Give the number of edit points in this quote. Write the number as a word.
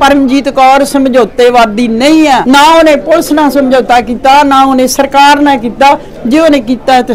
one